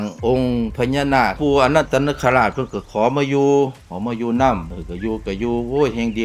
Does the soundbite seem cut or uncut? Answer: cut